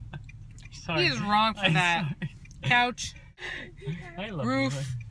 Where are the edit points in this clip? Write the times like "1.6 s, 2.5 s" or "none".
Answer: 3.3 s